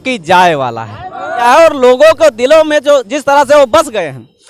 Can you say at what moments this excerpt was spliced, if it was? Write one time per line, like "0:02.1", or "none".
0:01.3